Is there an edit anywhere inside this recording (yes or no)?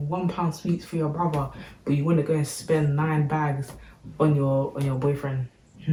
no